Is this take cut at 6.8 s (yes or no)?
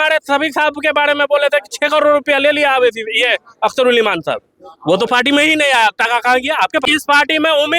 yes